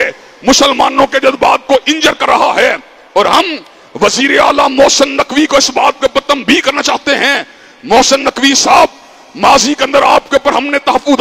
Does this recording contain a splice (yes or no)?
no